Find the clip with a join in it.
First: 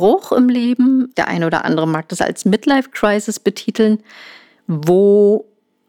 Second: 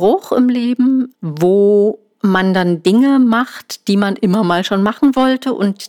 second; 2 cuts; at 1.2 s, 2.1 s

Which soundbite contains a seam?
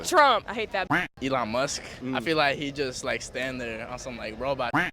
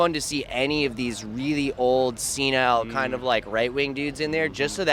first; 2 cuts; at 1.1 s, 1.9 s

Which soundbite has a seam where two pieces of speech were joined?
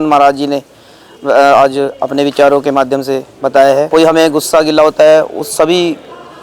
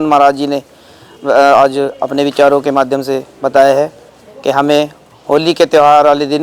first; 1 cut; at 3.9 s

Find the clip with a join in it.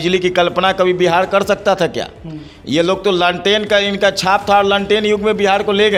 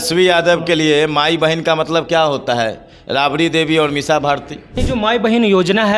second; 1 cut; at 4.8 s

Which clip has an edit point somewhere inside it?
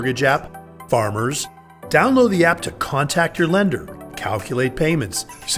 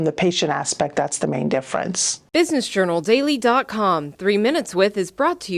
second; 1 cut; at 2.1 s

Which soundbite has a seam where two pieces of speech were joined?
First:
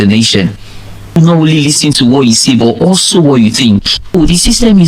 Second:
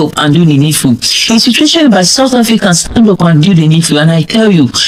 first; 2 cuts; at 1.2 s, 4.1 s

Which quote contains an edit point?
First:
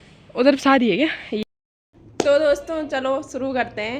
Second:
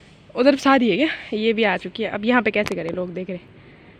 first; 1 cut; at 1.4 s

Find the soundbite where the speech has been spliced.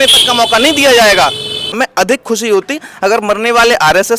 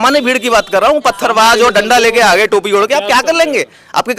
first; 1 cut; at 1.7 s

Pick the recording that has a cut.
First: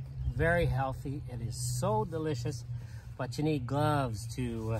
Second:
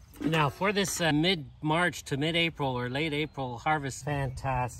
second; 2 cuts; at 1.1 s, 3.9 s

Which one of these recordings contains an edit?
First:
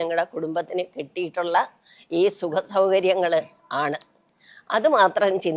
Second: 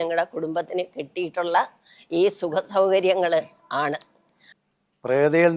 second; 1 cut; at 4.5 s

